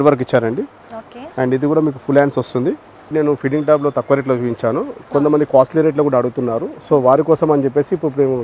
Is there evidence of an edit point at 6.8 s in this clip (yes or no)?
no